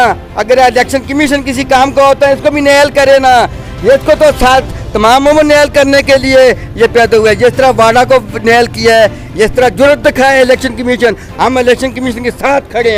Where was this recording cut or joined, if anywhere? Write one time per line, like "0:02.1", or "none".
none